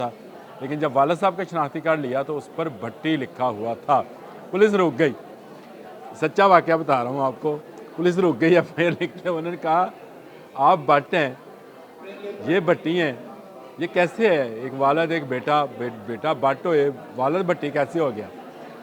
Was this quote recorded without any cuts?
yes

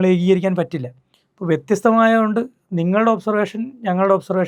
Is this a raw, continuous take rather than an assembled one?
yes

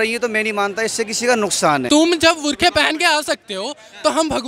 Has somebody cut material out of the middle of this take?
yes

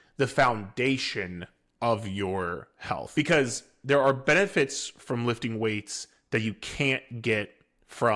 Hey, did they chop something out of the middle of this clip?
yes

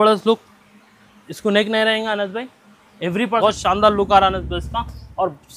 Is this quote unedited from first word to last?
no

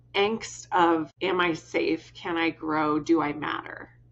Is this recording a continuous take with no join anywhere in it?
no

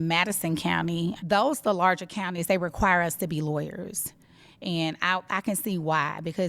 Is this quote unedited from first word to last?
no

